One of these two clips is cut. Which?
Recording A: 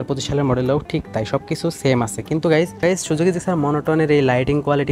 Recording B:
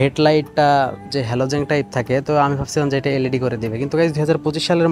A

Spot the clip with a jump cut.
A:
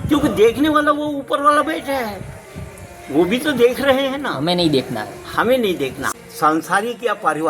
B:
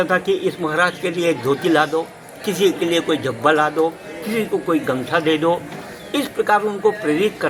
A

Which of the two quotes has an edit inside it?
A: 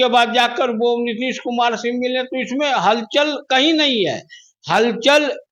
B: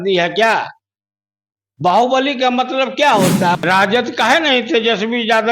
B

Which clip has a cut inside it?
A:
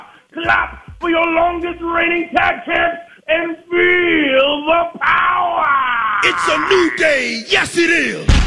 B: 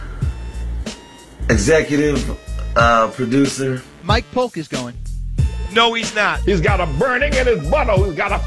A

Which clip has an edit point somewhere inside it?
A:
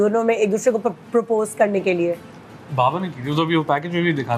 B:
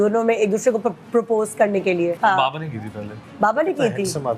B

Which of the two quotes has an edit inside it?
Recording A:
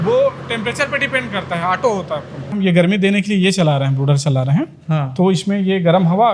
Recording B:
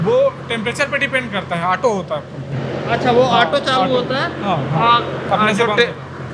A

